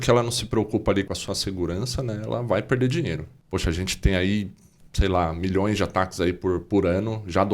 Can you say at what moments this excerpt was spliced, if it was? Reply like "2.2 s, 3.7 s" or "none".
1.1 s, 3.3 s